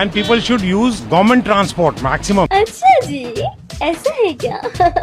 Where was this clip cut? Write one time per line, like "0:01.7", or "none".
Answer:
0:01.0
0:02.5